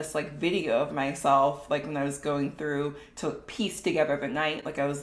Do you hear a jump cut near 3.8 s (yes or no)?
no